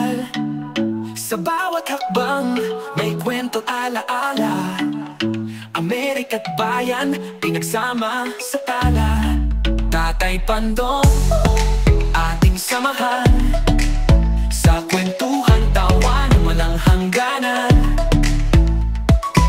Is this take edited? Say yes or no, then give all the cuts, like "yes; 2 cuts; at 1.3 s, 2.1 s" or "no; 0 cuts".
no; 0 cuts